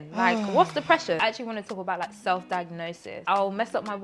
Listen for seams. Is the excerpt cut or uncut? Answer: cut